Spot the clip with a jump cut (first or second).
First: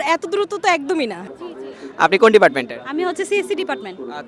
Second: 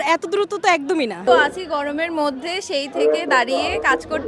second